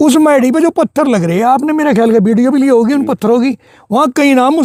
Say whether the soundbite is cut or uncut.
uncut